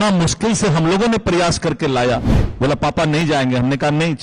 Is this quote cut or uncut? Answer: uncut